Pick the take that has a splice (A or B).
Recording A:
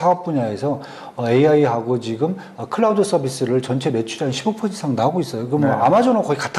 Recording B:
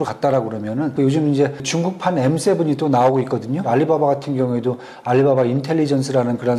B